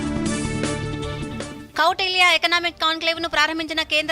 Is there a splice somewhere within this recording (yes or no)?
yes